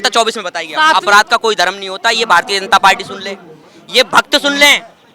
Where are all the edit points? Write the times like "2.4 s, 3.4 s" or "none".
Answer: 0.9 s